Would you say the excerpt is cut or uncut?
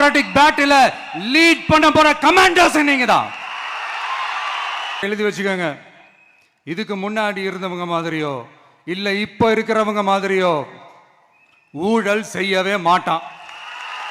cut